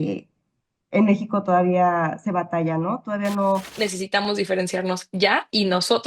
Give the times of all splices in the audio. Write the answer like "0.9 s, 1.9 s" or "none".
3.7 s